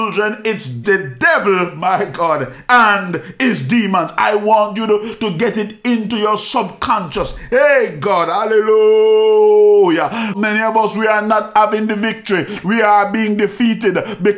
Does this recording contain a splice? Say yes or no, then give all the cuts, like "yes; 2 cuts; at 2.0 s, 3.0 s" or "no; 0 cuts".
yes; 2 cuts; at 0.8 s, 10.4 s